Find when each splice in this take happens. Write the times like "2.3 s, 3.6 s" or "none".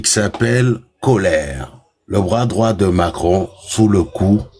none